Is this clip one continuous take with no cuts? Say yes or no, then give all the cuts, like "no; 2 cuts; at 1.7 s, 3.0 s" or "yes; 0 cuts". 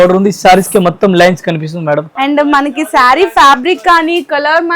no; 1 cut; at 2.1 s